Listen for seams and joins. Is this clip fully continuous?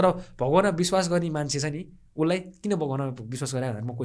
yes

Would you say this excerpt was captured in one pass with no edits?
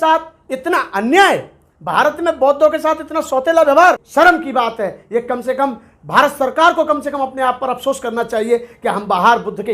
no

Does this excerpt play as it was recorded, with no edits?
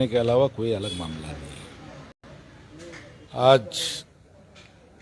yes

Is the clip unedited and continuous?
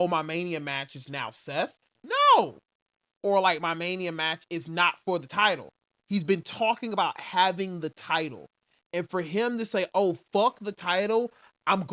yes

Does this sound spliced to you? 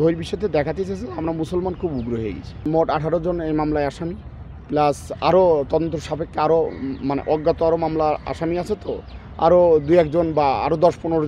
no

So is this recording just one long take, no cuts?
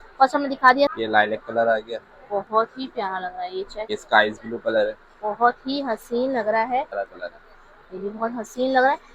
no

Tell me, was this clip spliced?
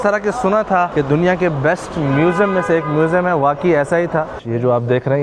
yes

